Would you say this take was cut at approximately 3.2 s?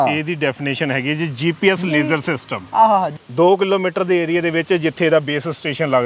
yes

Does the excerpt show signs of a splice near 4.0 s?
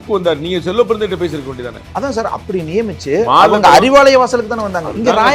no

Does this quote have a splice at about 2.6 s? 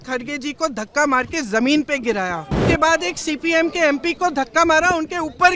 yes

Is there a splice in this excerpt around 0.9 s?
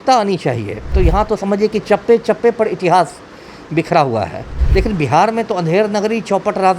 yes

